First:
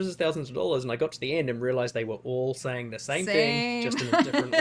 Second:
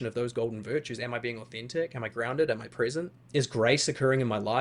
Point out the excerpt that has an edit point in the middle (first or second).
second